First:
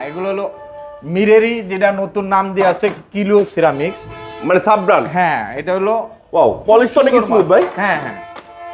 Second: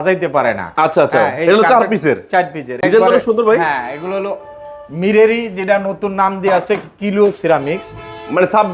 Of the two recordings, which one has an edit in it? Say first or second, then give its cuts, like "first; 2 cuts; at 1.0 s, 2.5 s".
second; 1 cut; at 2.8 s